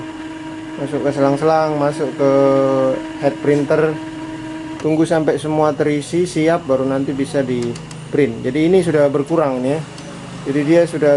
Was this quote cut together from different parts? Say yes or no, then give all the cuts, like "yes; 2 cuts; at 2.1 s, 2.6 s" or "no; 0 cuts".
no; 0 cuts